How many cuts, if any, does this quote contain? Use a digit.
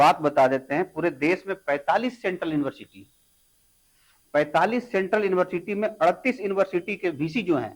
0